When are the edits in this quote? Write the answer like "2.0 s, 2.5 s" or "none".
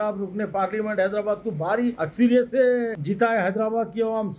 2.0 s, 3.0 s